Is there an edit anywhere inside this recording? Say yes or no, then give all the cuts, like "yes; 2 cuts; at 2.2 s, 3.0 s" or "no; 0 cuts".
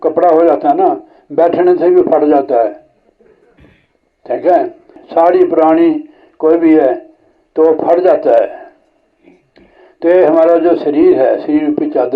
yes; 1 cut; at 5.0 s